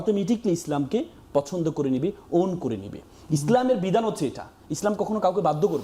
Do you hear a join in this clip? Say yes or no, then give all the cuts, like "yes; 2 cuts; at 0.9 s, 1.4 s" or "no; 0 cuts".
no; 0 cuts